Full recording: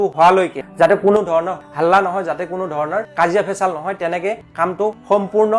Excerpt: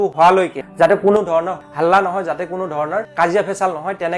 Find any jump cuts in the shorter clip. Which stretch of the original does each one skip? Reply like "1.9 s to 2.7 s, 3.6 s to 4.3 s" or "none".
none